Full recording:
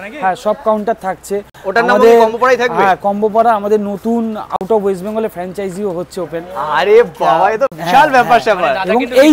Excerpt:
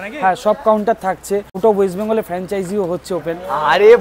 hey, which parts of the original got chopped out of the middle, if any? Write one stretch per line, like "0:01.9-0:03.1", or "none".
0:01.5-0:04.6